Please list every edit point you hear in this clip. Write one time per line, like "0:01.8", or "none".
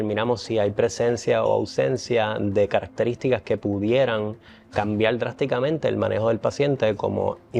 none